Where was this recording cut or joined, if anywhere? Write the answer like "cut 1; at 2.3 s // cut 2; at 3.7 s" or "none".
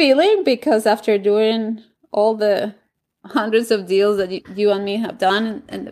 cut 1; at 4.4 s // cut 2; at 5.2 s